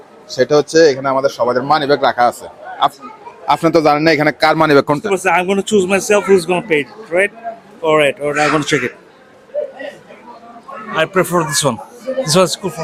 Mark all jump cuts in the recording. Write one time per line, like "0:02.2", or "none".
none